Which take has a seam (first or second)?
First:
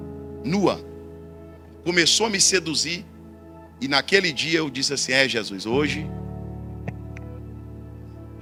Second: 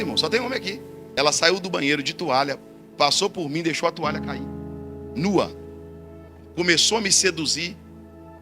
second